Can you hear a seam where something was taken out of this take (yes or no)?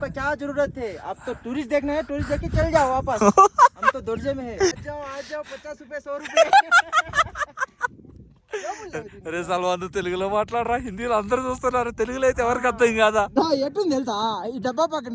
yes